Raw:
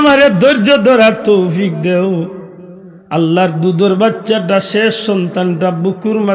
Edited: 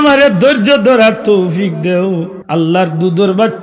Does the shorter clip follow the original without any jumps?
no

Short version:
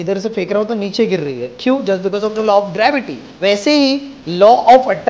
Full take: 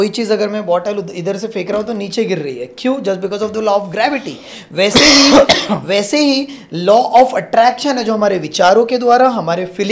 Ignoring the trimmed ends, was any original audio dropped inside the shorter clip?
yes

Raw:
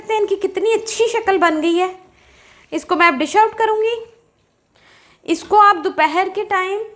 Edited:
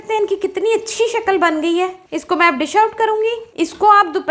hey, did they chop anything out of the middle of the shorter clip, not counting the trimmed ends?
yes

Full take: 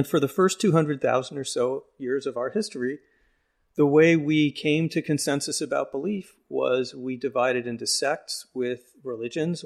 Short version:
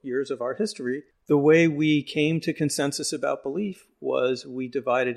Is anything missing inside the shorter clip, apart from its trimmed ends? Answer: yes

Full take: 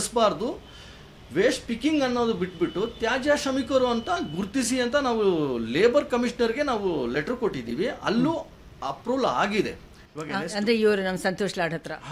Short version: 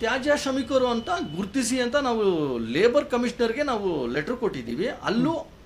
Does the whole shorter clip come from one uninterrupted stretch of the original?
yes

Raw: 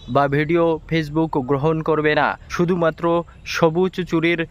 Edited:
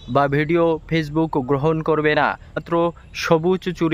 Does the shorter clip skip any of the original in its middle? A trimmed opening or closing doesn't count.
yes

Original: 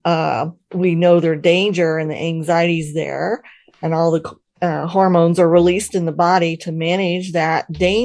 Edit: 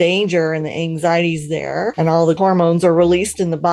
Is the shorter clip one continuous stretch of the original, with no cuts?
no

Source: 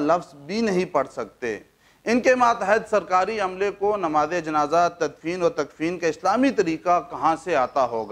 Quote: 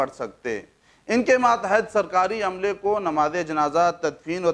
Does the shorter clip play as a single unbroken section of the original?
yes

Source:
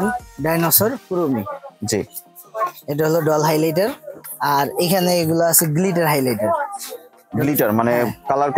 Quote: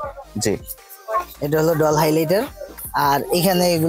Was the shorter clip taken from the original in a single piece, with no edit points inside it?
yes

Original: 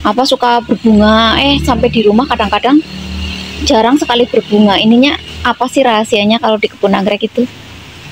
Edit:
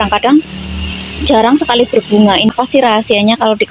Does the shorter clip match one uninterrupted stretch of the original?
no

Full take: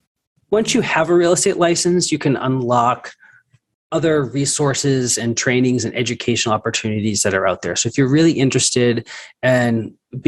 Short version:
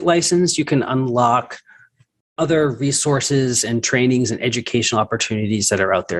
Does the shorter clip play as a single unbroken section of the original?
yes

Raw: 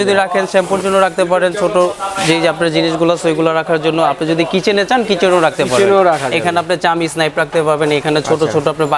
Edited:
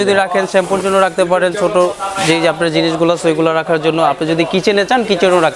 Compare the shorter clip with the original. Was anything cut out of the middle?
no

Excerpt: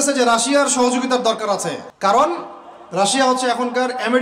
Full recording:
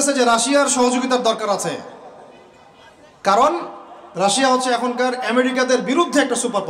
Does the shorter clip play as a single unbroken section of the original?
no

